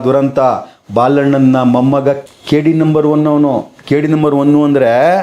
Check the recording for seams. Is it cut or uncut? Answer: cut